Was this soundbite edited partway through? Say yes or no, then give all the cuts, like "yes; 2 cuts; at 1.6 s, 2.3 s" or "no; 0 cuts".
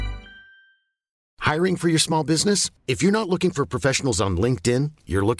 yes; 1 cut; at 1.1 s